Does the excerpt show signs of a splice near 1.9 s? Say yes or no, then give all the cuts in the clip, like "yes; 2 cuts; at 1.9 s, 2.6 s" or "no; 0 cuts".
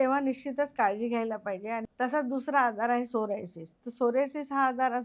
yes; 1 cut; at 1.9 s